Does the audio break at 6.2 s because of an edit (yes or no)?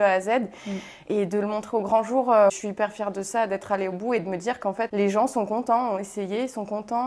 no